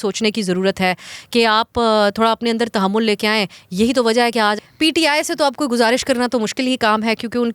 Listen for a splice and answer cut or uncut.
cut